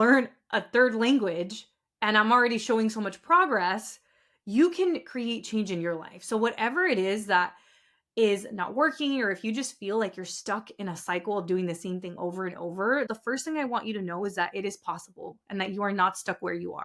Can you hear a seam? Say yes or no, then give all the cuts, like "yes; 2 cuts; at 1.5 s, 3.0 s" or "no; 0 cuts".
yes; 1 cut; at 13.1 s